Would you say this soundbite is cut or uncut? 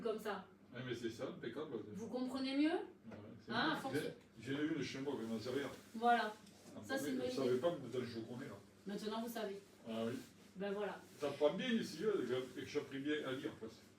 cut